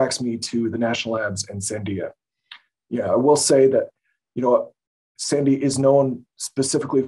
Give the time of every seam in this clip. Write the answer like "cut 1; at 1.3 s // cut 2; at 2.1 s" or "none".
none